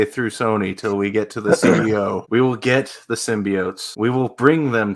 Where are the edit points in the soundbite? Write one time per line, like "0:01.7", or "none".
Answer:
0:02.2
0:03.8